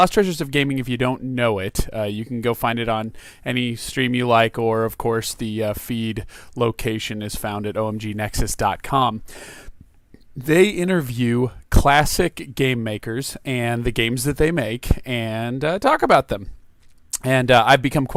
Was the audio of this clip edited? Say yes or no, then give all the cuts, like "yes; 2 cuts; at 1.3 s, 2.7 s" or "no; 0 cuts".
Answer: no; 0 cuts